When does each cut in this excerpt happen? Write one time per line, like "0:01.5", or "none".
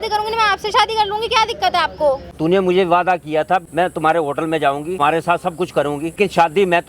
0:02.3
0:03.6
0:05.0
0:06.2